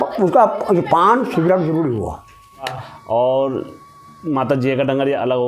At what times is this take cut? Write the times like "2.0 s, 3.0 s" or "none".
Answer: 2.9 s